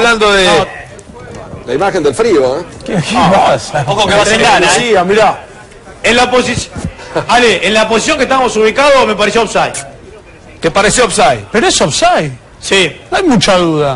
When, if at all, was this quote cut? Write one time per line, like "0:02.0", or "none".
0:01.9